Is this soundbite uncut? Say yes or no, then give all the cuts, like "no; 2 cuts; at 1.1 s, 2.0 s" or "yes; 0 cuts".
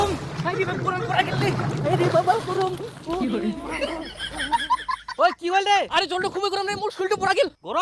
no; 2 cuts; at 3.2 s, 5.1 s